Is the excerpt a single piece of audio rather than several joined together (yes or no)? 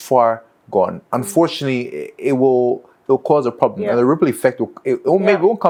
yes